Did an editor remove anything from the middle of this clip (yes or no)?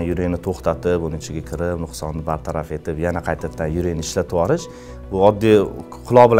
no